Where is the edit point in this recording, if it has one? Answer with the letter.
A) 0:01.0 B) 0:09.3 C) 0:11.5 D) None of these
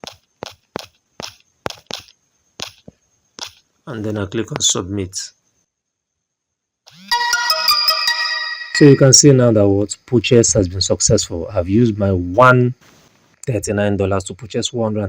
A